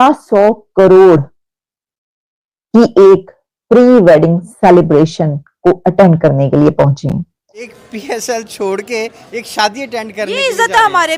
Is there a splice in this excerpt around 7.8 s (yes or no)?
yes